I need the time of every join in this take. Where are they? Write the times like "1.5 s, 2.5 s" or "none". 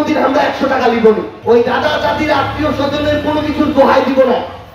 1.3 s